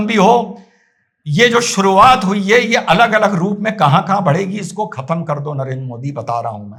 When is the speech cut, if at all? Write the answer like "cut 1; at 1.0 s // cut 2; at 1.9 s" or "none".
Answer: none

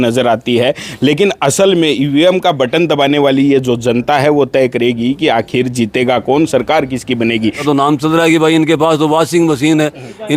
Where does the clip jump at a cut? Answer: cut 1; at 7.6 s

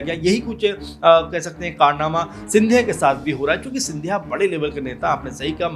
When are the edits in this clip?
none

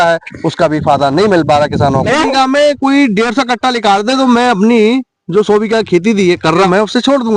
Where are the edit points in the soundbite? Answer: cut 1; at 2.2 s // cut 2; at 6.7 s

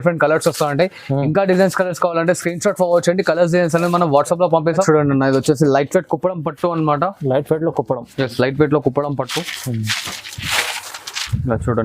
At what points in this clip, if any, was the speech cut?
cut 1; at 4.8 s

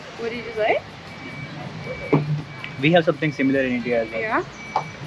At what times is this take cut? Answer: none

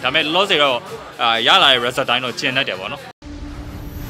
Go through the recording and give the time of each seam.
cut 1; at 3.1 s

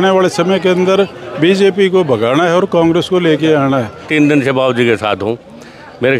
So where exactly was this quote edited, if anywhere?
cut 1; at 4.1 s

